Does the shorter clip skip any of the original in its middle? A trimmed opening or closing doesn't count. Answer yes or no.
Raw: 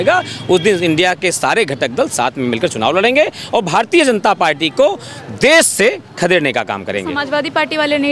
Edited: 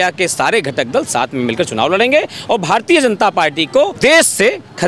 yes